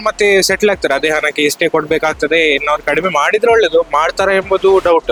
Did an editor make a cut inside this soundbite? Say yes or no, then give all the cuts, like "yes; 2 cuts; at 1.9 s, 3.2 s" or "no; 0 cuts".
no; 0 cuts